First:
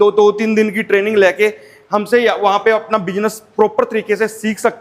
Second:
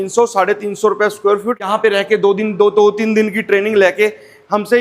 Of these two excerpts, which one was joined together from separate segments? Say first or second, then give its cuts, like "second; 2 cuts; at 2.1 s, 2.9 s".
second; 1 cut; at 1.7 s